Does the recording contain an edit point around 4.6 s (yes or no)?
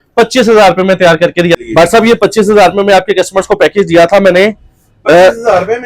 no